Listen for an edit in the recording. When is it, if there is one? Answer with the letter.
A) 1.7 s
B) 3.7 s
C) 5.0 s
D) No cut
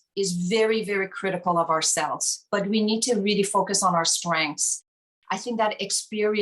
C